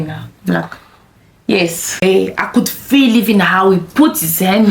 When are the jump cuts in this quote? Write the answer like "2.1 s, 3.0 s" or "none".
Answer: 2.0 s